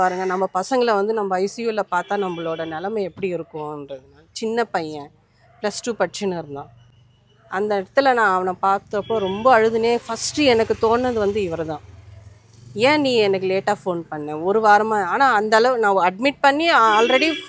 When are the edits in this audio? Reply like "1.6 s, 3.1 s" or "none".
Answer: none